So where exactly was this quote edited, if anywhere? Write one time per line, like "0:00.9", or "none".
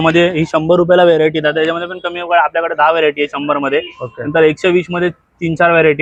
none

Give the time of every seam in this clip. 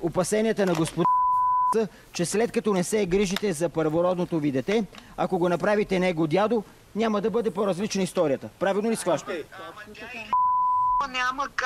none

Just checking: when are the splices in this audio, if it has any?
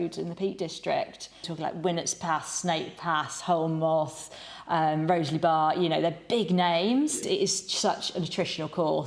0:01.5
0:07.2

